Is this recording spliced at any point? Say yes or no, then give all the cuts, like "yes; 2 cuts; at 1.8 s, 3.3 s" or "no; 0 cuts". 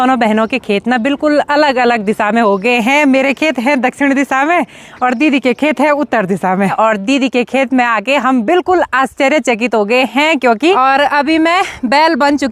yes; 2 cuts; at 6.7 s, 10.8 s